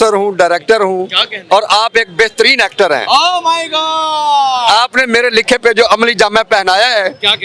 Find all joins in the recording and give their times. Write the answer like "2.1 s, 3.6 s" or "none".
none